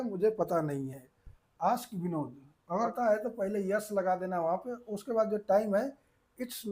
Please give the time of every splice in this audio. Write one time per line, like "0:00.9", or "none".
0:02.9